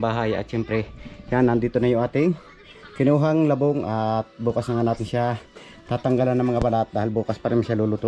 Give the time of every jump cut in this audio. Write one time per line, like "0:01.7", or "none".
none